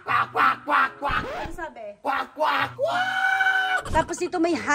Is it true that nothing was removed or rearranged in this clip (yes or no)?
no